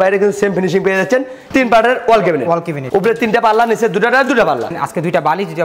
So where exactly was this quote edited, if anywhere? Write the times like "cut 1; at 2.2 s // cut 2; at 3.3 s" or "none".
cut 1; at 1.3 s // cut 2; at 4.7 s